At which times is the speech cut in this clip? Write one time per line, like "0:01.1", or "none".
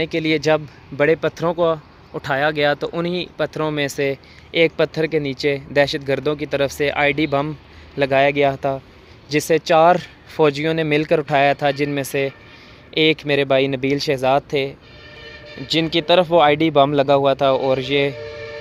none